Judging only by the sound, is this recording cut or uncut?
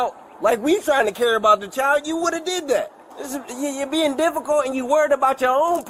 uncut